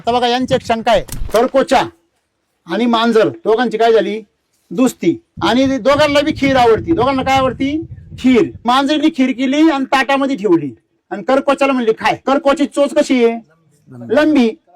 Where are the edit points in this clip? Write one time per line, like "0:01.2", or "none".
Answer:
0:01.2
0:05.3
0:08.6
0:12.2